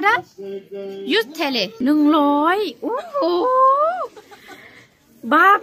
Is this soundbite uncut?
no; 1 cut; at 1.8 s

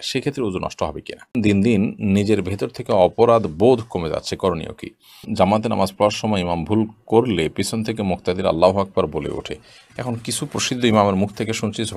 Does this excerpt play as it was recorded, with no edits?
no; 2 cuts; at 1.4 s, 5.3 s

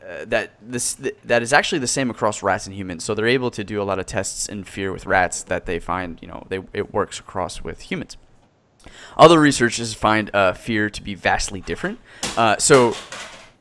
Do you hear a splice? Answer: yes; 1 cut; at 9.9 s

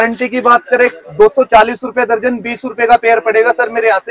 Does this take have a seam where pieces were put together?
no; 0 cuts

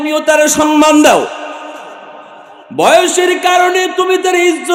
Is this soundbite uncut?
yes; 0 cuts

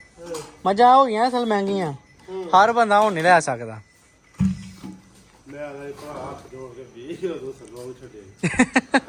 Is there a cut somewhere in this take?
no; 0 cuts

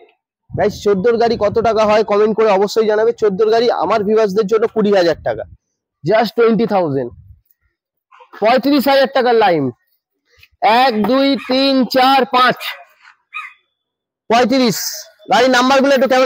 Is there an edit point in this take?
no; 0 cuts

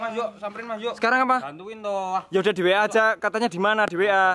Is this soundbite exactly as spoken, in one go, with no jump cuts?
yes; 0 cuts

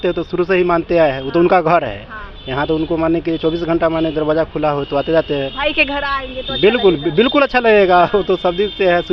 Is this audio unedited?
yes; 0 cuts

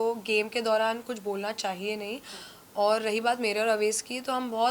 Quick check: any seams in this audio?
no; 0 cuts

